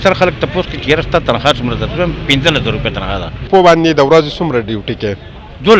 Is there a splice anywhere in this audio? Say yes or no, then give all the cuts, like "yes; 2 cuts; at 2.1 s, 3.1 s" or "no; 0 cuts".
yes; 1 cut; at 3.5 s